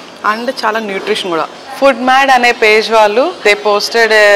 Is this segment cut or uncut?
cut